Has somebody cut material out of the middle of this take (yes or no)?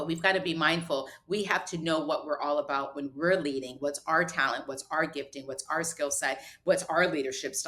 no